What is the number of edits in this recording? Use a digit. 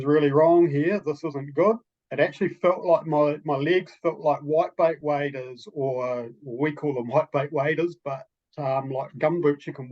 1